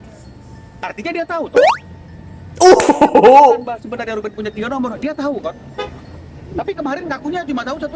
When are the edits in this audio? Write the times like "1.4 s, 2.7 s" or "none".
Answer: none